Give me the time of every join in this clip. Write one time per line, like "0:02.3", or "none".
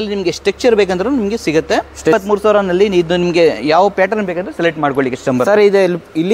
0:02.1